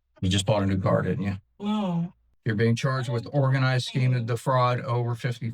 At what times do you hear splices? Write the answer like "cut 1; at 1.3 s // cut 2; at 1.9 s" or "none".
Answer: cut 1; at 2.2 s